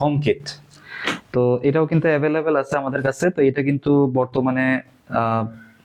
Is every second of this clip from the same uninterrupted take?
yes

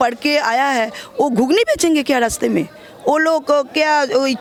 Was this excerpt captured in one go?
yes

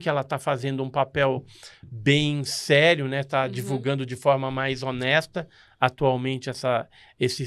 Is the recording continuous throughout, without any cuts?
yes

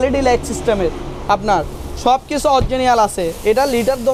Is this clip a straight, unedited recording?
yes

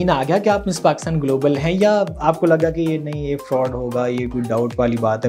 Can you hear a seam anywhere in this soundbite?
no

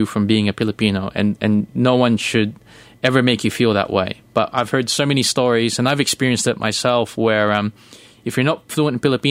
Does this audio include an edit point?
no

